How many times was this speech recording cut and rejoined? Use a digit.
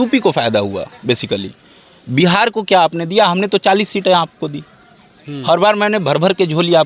0